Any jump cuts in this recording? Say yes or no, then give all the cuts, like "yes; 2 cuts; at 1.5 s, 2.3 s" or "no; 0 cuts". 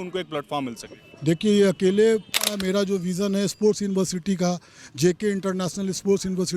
yes; 1 cut; at 2.6 s